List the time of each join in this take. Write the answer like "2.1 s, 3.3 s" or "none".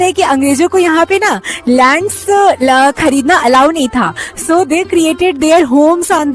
none